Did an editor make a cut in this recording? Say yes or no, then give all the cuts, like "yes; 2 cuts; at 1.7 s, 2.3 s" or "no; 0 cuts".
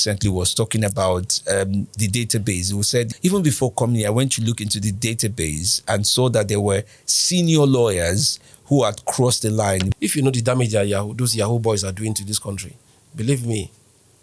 yes; 2 cuts; at 3.1 s, 9.9 s